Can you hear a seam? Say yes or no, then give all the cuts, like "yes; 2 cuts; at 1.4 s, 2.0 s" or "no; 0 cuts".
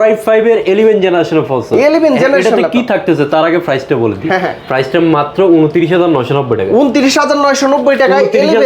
no; 0 cuts